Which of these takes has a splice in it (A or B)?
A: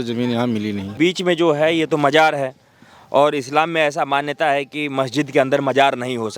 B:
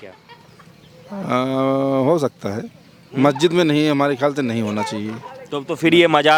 A